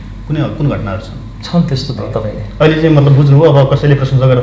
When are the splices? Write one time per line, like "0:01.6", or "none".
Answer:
0:02.1

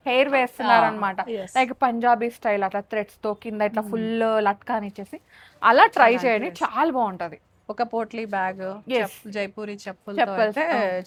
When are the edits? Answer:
none

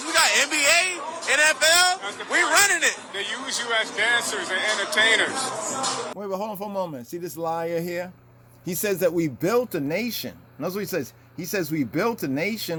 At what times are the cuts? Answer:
none

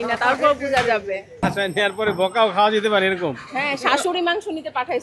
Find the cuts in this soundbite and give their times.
0:01.3

